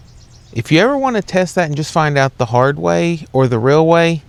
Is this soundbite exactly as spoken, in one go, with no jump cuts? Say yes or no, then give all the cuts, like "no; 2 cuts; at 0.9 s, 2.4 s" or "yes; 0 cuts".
yes; 0 cuts